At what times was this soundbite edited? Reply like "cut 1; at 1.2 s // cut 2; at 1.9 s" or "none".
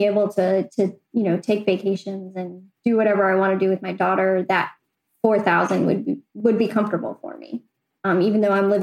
cut 1; at 6.3 s